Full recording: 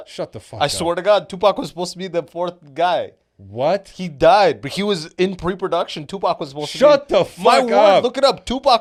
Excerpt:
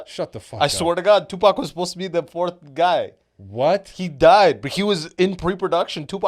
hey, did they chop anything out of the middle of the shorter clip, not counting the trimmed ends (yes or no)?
no